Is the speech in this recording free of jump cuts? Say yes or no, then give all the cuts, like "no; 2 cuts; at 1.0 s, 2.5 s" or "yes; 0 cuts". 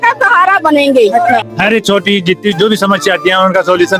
no; 1 cut; at 1.5 s